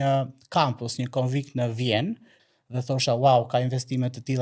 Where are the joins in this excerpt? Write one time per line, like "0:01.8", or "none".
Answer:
0:02.4